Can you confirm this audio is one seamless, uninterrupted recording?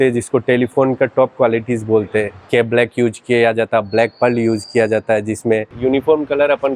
no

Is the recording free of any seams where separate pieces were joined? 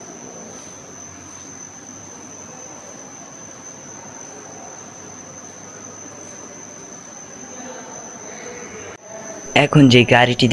yes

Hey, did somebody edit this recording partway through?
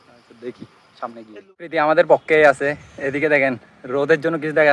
yes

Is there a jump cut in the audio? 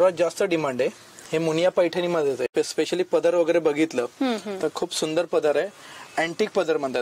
yes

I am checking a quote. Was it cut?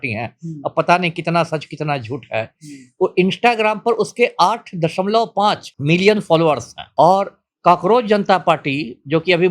yes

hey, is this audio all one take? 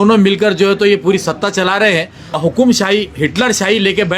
no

